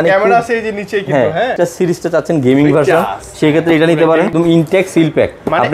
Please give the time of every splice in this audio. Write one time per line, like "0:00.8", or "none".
0:01.5
0:04.3